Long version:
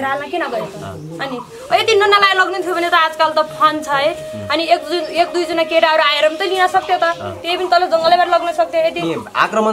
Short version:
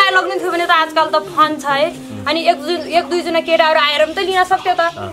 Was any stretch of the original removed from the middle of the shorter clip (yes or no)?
no